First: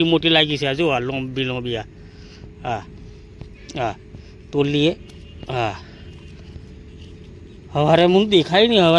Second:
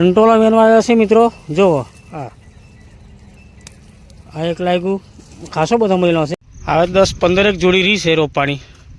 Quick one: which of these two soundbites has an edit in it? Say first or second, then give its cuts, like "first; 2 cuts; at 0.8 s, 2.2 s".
second; 1 cut; at 6.4 s